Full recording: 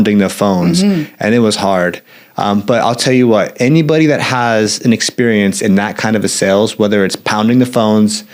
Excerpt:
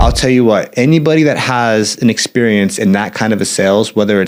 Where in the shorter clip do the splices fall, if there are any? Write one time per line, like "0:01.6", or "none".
none